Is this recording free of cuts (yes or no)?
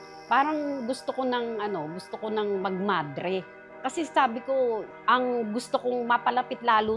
no